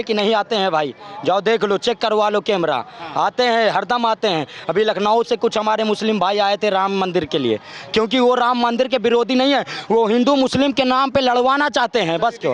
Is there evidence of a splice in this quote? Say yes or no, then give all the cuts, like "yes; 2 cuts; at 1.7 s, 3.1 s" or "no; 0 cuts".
no; 0 cuts